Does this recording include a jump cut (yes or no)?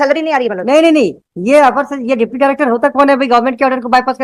no